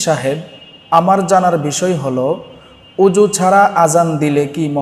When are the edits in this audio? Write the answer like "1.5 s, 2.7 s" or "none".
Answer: none